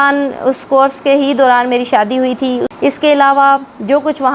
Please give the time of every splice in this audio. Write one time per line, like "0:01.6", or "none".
0:02.7